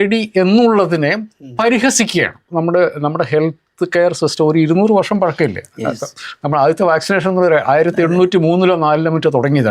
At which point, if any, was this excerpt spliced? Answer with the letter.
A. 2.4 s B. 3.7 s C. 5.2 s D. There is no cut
A